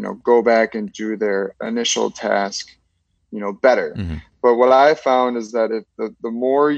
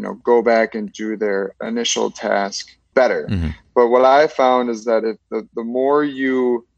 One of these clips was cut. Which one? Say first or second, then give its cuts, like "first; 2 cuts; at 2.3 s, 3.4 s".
second; 1 cut; at 2.9 s